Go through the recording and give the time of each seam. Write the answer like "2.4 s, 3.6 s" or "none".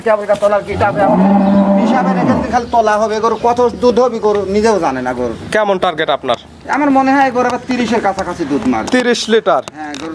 none